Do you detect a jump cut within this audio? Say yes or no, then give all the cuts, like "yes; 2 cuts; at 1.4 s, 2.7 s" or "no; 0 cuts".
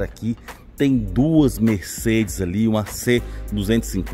no; 0 cuts